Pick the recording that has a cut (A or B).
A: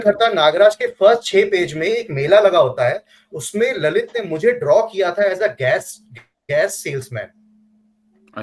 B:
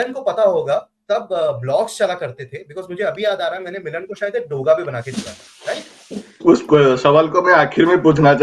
B